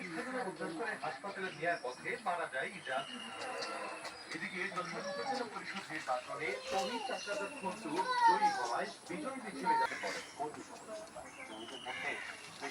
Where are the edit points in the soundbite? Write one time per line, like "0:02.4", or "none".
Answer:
0:09.9